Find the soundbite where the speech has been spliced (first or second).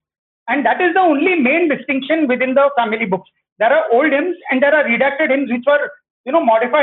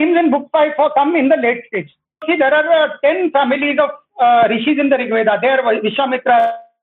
second